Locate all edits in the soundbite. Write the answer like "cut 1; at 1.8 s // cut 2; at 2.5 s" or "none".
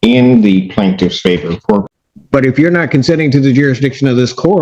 cut 1; at 1.8 s